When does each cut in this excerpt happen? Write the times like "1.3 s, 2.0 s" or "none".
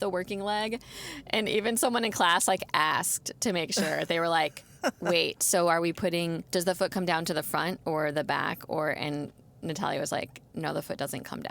6.4 s, 10.4 s